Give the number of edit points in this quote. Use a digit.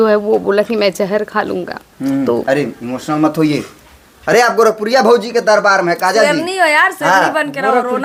0